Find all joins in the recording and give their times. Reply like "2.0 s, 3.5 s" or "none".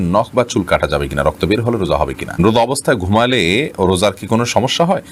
2.4 s